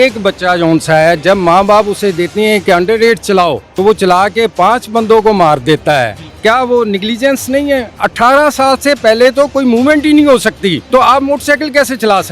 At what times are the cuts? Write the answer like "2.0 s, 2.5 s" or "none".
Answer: 3.7 s, 6.2 s, 7.9 s, 10.8 s